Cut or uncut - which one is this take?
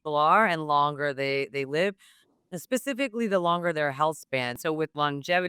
cut